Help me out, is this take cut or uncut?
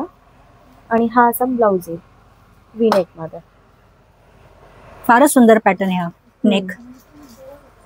uncut